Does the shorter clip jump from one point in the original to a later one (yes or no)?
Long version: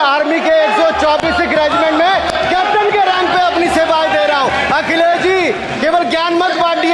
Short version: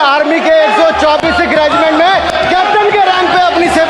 no